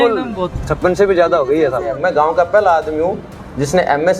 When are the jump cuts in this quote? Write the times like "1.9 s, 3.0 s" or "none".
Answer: 2.0 s